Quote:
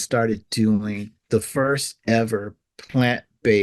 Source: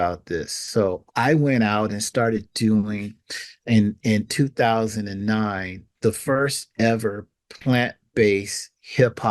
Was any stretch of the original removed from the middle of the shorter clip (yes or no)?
yes